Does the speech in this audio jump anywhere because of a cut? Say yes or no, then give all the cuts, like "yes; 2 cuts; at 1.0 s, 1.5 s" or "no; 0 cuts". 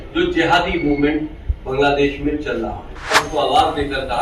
yes; 1 cut; at 3.2 s